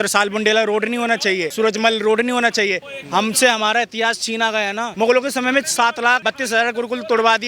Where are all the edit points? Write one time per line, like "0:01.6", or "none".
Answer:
0:01.5
0:02.9
0:04.8
0:06.2